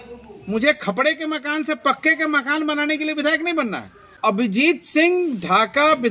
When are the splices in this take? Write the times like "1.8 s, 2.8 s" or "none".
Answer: 4.1 s